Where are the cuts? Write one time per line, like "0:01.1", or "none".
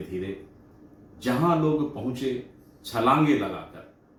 none